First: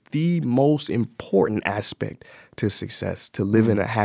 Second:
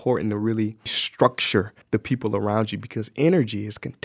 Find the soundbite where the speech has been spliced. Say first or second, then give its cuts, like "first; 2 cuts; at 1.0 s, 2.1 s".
second; 2 cuts; at 1.0 s, 1.8 s